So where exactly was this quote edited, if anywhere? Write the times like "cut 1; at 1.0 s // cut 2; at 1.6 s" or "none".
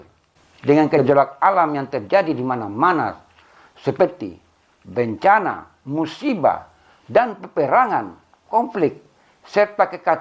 none